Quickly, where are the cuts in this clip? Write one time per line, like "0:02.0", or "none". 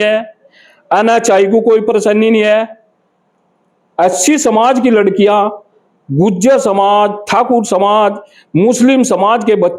none